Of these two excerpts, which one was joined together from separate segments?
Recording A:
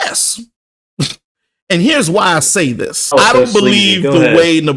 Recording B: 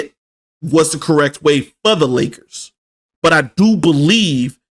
A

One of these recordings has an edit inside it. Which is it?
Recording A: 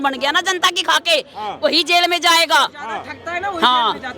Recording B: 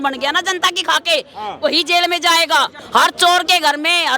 B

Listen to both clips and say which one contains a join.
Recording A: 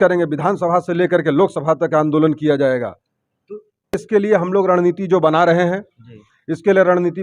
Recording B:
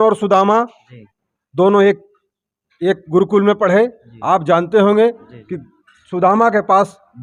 A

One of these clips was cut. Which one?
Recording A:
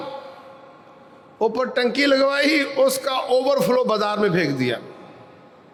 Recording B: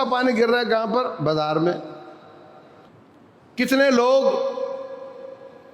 B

